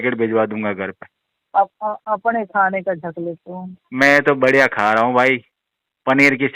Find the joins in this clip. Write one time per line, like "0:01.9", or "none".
none